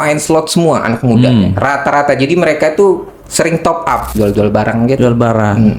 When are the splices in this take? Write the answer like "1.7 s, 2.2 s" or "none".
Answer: 4.1 s

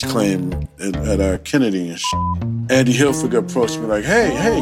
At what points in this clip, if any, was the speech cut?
2.1 s

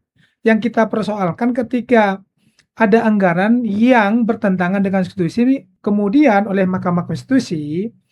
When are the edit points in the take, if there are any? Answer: 5.7 s

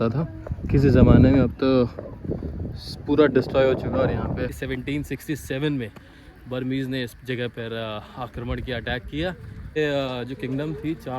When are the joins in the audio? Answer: 4.6 s, 9.8 s

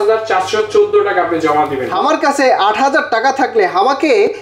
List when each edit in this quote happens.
1.9 s

